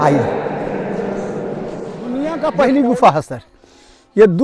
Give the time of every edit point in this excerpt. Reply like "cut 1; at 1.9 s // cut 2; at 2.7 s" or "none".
cut 1; at 2.3 s